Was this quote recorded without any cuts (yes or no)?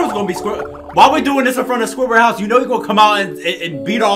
yes